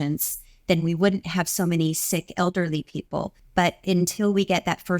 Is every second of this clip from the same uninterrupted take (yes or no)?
no